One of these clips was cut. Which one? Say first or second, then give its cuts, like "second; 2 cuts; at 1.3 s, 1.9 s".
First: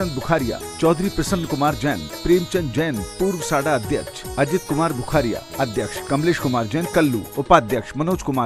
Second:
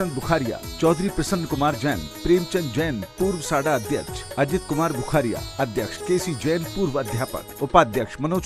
first; 2 cuts; at 5.9 s, 7.3 s